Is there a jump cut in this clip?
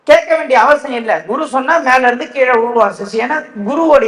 no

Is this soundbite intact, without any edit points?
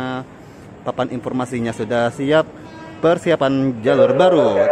yes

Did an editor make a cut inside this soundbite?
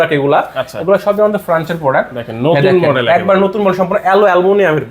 no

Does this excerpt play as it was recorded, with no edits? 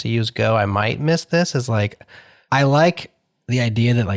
yes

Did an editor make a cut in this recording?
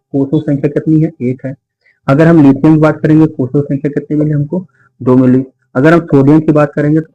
no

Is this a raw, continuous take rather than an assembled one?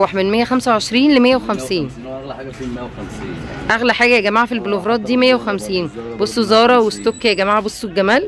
yes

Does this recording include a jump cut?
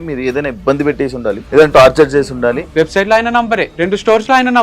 yes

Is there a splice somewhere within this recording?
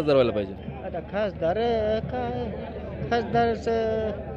no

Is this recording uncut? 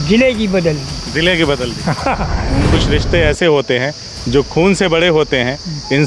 no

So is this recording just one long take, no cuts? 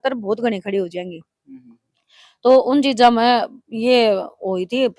yes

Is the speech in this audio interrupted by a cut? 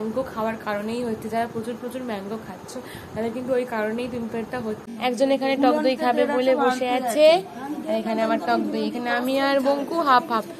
yes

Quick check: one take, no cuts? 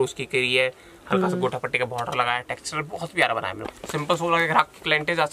no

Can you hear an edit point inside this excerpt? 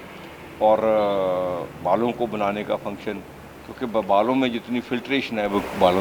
no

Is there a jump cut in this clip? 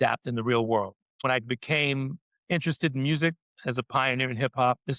yes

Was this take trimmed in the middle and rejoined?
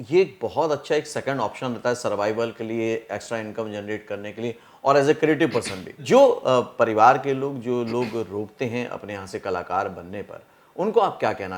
yes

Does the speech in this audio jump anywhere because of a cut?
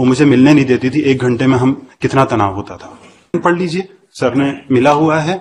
yes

